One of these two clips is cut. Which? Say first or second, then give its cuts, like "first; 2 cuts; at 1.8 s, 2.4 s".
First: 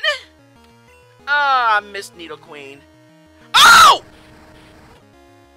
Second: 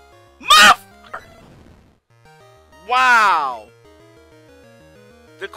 second; 1 cut; at 1.2 s